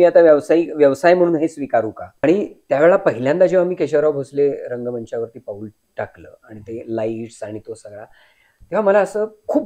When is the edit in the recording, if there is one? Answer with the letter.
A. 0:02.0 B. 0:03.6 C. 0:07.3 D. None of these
A